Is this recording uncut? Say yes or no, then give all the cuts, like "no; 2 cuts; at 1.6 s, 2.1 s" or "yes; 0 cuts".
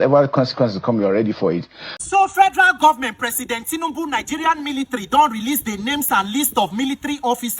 no; 1 cut; at 2.0 s